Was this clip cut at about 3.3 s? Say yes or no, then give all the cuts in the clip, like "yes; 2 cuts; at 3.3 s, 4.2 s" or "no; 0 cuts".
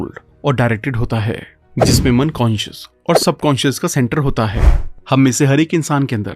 no; 1 cut; at 4.7 s